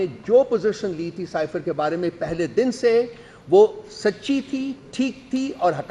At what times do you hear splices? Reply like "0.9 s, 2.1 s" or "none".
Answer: none